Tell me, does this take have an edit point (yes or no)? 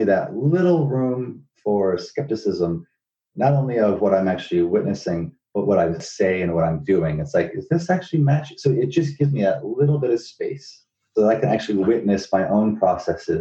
yes